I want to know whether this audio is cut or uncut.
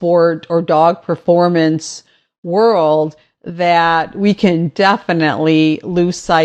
uncut